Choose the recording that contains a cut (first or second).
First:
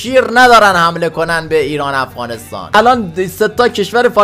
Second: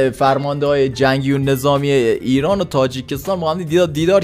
first